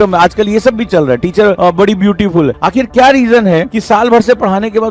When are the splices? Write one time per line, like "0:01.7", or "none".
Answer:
0:01.6
0:02.6